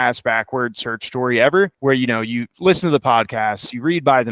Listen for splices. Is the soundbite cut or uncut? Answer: cut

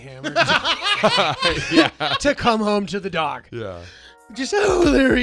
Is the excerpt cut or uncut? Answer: uncut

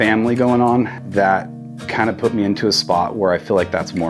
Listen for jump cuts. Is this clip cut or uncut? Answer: cut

